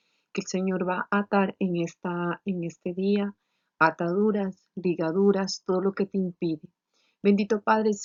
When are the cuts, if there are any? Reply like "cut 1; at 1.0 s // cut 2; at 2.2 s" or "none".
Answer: none